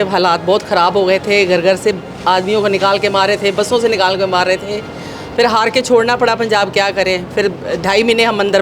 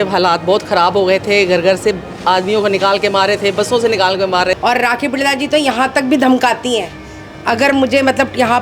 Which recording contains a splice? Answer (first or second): second